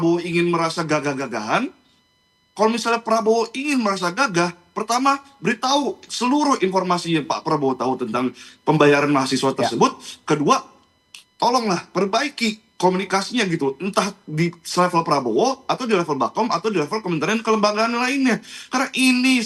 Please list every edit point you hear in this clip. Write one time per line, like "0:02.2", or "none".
none

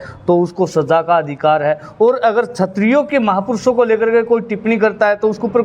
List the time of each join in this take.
none

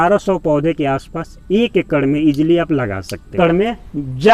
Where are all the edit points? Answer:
0:03.3

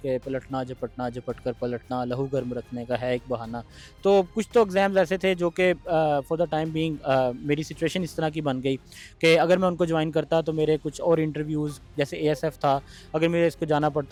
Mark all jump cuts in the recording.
none

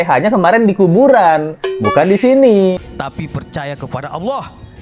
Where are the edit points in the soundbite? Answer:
0:02.8

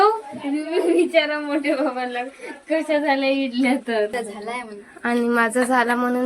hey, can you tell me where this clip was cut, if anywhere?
0:04.1

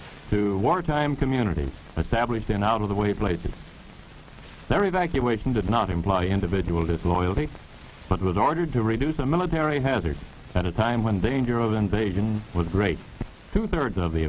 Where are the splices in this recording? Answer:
0:13.1

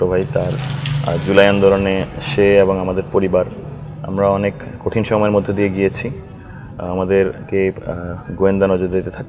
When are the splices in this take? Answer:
none

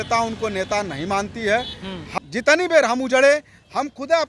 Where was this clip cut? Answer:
0:02.2

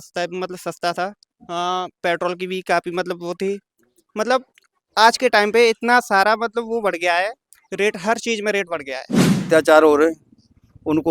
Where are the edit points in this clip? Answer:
0:09.4

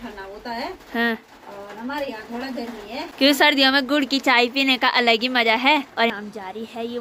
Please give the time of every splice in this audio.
0:03.0
0:06.1

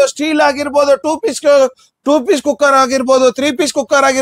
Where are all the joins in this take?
none

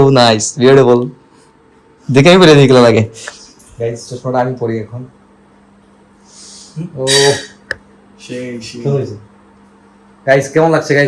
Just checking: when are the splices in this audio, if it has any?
none

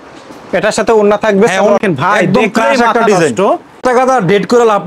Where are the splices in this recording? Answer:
0:01.8
0:03.8

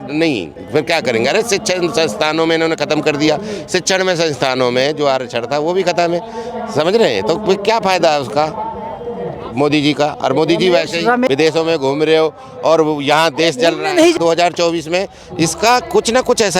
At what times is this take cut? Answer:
0:11.3
0:14.1

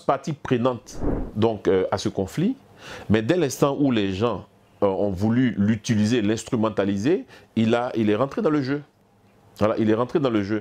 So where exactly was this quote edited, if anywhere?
none

